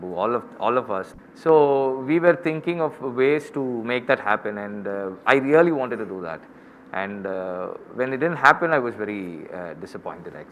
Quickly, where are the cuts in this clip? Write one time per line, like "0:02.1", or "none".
none